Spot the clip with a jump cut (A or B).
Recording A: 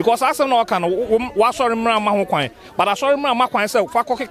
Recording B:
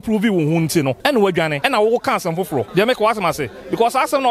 B